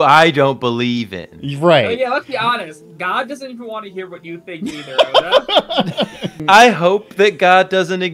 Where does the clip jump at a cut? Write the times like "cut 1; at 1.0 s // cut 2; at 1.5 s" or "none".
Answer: cut 1; at 6.4 s

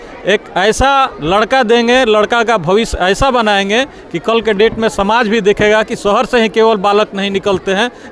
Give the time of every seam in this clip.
none

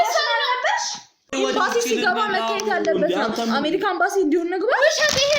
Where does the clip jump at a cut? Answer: cut 1; at 1.3 s

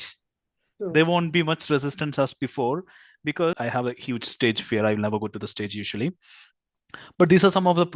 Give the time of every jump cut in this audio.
cut 1; at 3.6 s

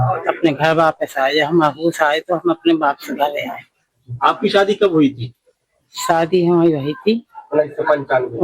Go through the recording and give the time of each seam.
cut 1; at 7.3 s

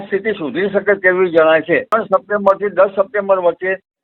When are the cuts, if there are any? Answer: cut 1; at 1.9 s

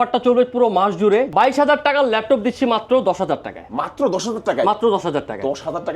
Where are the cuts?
cut 1; at 1.3 s

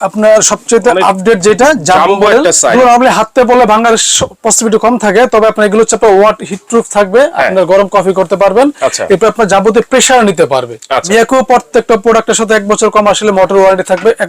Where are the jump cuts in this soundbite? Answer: cut 1; at 2.7 s // cut 2; at 11.0 s

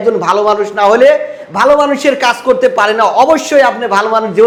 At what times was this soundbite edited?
none

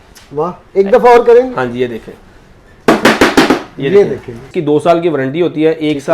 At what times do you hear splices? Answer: cut 1; at 4.5 s

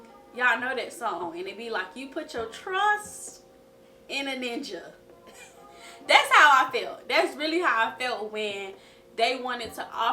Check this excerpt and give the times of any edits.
cut 1; at 1.2 s

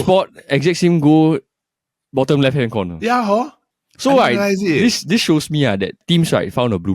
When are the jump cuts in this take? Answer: cut 1; at 6.0 s

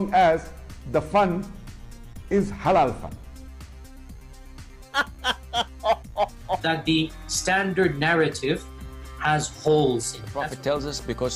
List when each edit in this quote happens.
cut 1; at 6.1 s

